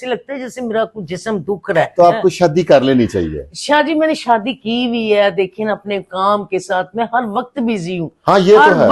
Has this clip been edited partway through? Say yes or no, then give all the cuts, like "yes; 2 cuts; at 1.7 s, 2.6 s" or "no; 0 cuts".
yes; 1 cut; at 1.9 s